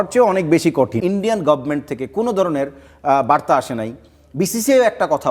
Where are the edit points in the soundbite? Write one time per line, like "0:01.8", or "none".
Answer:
0:00.9